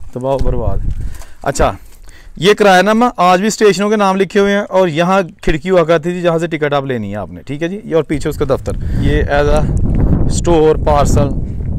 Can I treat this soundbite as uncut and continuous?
no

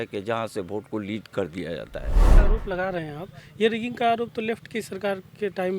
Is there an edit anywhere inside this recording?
yes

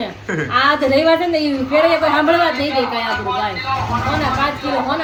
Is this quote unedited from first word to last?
yes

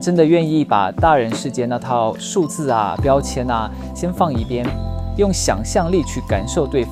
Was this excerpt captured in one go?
yes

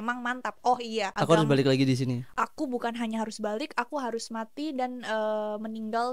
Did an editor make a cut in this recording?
yes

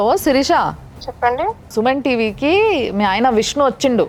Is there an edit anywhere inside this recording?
no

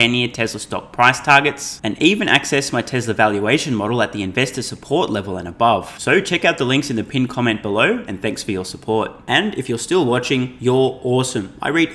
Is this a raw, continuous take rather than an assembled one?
yes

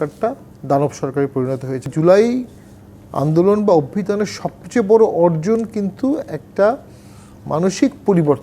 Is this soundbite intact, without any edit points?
no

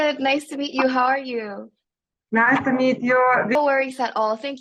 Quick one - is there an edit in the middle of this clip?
no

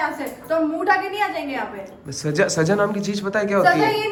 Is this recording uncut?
yes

